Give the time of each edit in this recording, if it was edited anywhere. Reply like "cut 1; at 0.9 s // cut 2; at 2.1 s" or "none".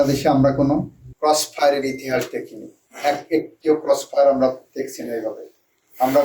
cut 1; at 1.0 s